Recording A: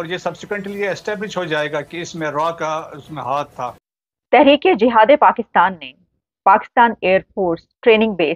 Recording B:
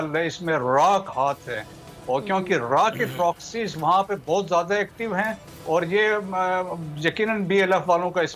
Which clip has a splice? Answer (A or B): A